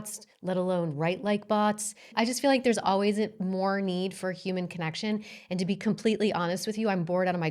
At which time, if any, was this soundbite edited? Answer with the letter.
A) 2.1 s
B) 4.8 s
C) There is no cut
A